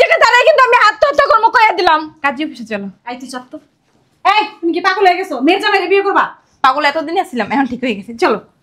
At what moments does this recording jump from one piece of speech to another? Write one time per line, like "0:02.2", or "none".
none